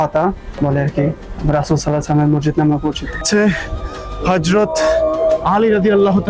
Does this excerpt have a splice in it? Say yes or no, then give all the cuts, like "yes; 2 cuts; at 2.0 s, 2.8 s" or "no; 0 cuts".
yes; 1 cut; at 3.2 s